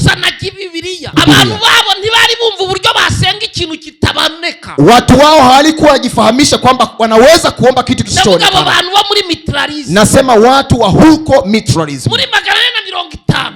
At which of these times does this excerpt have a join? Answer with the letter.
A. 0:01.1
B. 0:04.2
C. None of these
A